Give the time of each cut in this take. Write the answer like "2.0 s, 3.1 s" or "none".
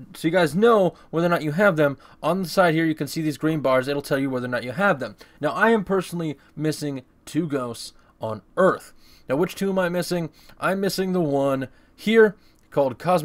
none